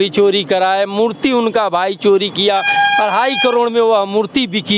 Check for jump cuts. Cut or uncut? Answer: uncut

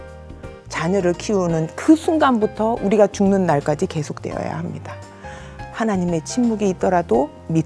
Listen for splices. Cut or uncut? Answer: uncut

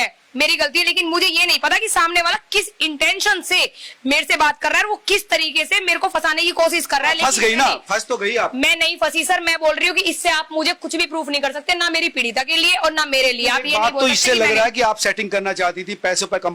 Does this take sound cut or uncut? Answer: uncut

